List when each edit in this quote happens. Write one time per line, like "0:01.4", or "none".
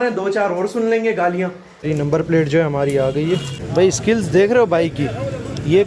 0:01.7
0:03.6